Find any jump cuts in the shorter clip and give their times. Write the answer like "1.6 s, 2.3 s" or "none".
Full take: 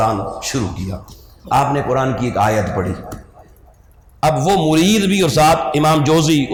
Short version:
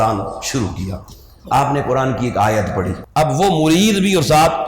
3.0 s